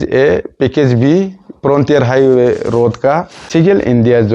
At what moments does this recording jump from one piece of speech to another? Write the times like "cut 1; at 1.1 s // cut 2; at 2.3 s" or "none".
cut 1; at 3.5 s